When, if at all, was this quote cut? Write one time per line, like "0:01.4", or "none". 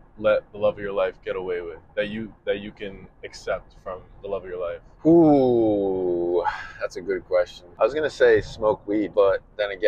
0:04.9
0:07.6
0:09.1